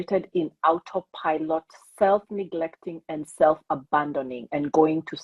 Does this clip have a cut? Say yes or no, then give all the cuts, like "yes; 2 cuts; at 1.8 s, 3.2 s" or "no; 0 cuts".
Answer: no; 0 cuts